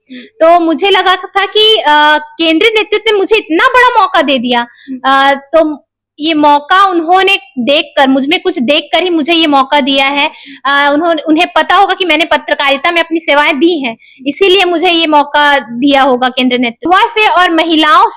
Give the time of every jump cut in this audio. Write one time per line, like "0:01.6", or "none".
0:16.9